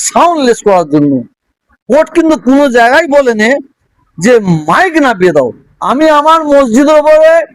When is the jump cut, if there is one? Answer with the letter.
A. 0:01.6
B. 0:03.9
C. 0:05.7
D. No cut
C